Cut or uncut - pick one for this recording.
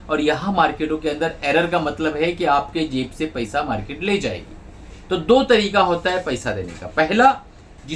uncut